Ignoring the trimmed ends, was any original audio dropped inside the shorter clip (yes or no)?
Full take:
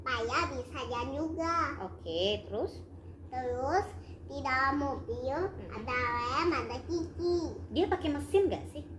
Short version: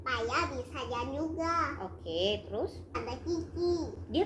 yes